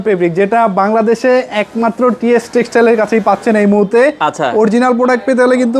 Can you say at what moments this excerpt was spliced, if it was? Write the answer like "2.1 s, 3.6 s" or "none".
none